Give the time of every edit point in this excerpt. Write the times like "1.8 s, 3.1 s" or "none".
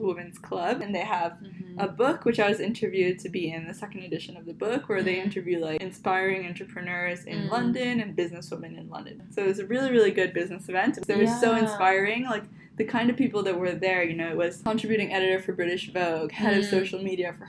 0.8 s, 5.8 s, 9.2 s, 11.0 s, 14.6 s